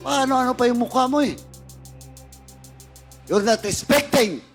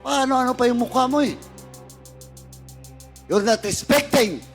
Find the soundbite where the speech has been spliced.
second; 2 cuts; at 1.6 s, 3.2 s

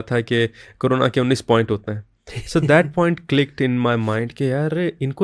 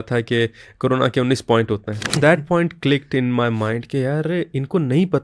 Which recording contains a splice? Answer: second; 1 cut; at 2.2 s

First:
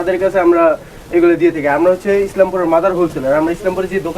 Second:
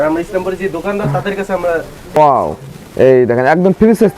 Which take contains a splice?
second; 1 cut; at 2.2 s

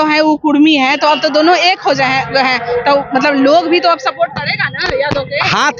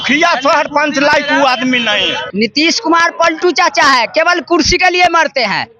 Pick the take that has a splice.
second; 1 cut; at 2.2 s

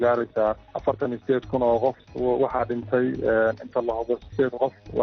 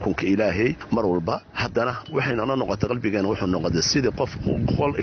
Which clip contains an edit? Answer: first; 1 cut; at 2.1 s

